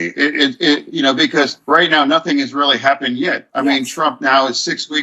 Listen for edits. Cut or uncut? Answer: cut